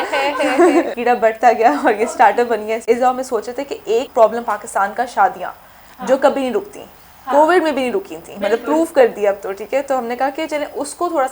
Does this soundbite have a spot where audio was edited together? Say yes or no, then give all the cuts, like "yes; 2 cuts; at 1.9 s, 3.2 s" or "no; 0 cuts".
yes; 3 cuts; at 0.9 s, 2.8 s, 4.1 s